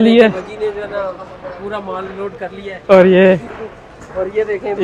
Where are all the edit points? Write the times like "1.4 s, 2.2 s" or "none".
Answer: none